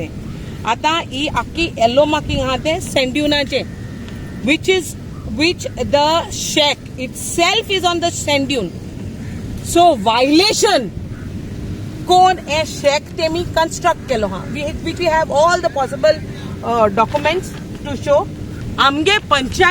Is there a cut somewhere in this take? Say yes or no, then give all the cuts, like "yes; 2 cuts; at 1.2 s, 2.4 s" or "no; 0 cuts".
yes; 1 cut; at 18.6 s